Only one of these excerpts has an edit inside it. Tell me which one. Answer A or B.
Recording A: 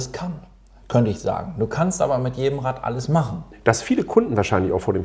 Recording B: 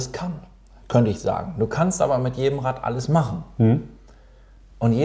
A